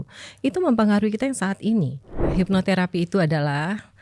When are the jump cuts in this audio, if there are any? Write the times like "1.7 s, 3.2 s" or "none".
2.2 s